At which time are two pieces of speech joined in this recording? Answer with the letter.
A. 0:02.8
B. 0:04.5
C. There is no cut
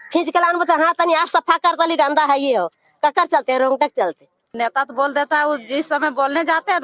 B